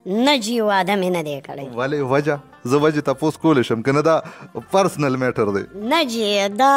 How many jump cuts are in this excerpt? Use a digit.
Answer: 0